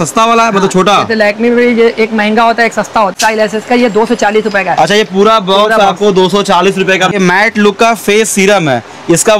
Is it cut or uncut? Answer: cut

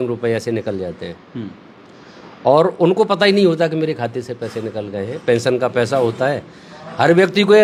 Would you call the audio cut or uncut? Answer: uncut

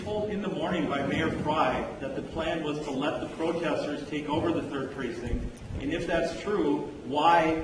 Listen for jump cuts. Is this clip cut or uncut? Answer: uncut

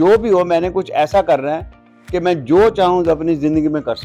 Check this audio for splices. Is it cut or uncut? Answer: uncut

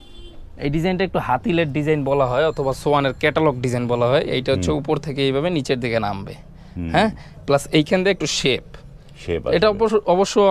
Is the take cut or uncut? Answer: uncut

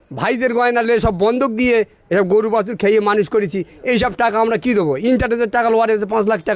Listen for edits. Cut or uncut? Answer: uncut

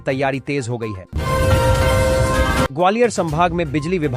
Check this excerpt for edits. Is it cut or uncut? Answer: cut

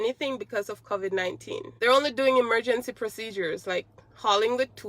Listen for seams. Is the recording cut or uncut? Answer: cut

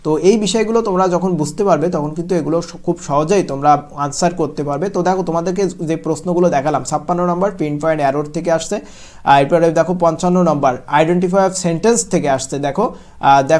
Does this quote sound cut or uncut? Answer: uncut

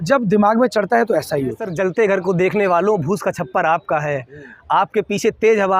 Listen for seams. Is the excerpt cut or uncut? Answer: cut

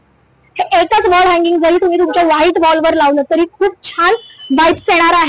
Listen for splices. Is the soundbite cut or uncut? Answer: uncut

